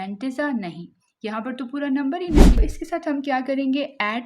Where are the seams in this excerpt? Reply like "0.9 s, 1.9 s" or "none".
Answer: 2.6 s